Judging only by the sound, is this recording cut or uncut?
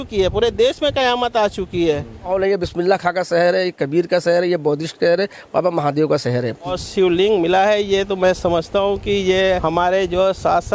cut